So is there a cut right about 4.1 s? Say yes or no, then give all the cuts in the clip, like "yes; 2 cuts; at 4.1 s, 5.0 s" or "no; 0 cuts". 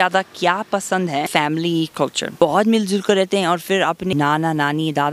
yes; 3 cuts; at 1.3 s, 2.4 s, 4.1 s